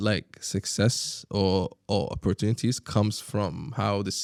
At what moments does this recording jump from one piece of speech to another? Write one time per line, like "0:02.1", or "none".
none